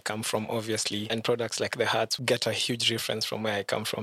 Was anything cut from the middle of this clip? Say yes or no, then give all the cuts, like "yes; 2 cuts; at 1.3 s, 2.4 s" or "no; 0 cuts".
yes; 2 cuts; at 1.1 s, 2.1 s